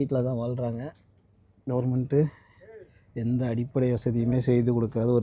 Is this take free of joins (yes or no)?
yes